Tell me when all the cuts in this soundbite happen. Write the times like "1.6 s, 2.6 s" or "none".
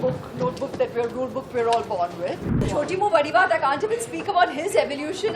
2.7 s